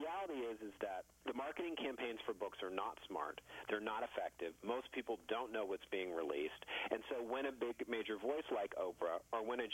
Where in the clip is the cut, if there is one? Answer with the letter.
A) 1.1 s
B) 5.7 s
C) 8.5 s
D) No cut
A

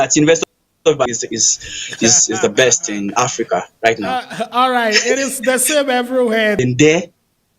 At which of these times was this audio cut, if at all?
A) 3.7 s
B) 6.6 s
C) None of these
B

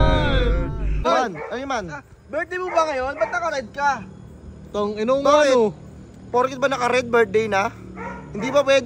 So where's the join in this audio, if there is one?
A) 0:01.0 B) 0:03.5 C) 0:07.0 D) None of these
A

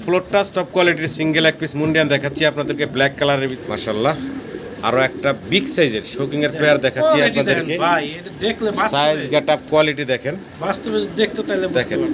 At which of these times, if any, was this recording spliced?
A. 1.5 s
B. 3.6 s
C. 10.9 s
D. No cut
B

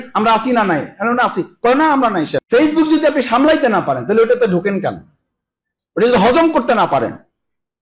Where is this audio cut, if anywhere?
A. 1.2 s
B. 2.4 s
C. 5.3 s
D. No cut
B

